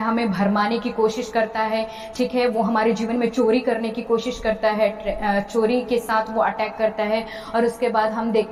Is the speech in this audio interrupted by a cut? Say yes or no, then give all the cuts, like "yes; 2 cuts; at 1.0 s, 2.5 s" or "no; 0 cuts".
no; 0 cuts